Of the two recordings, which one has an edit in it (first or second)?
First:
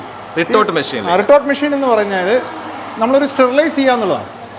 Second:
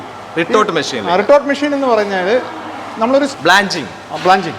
second